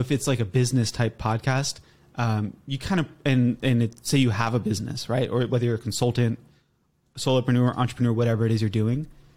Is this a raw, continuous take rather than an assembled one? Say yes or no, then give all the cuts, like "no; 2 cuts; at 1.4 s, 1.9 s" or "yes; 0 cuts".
yes; 0 cuts